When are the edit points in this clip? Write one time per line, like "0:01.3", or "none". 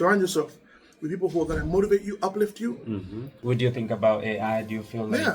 0:03.3